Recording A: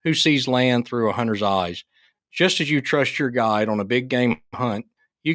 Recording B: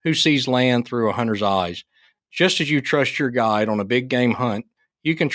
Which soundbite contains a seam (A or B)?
B